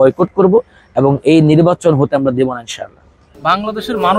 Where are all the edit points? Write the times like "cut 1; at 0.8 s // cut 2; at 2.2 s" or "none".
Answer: cut 1; at 3.2 s